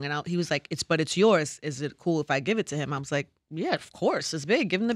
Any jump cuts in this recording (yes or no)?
no